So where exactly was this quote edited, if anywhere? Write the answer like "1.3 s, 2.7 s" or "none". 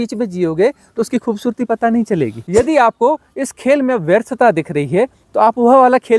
2.4 s